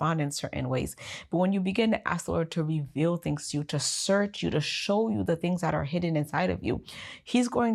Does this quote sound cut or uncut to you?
uncut